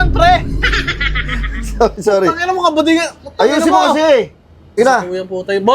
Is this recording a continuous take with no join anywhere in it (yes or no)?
no